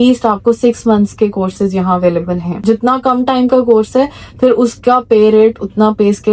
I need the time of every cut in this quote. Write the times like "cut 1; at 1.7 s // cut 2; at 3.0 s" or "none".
cut 1; at 2.6 s

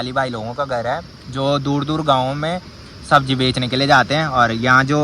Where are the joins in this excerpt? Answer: none

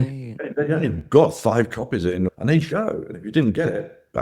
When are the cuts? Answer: cut 1; at 2.3 s

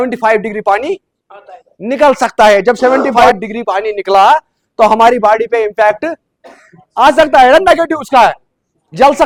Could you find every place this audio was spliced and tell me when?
none

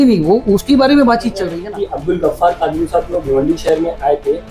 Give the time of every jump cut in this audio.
cut 1; at 1.6 s

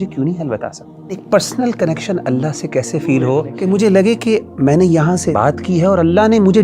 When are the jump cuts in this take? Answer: cut 1; at 1.2 s // cut 2; at 3.5 s // cut 3; at 5.3 s

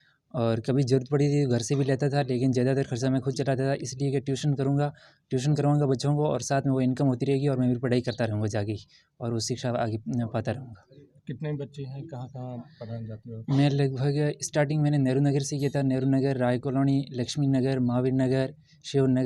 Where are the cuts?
none

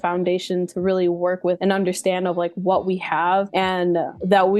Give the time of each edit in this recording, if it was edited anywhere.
none

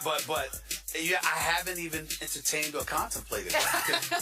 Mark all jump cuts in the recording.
cut 1; at 2.7 s

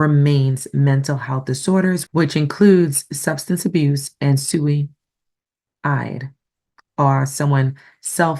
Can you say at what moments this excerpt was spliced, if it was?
none

